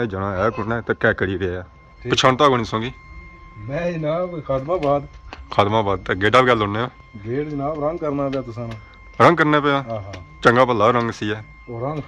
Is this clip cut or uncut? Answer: cut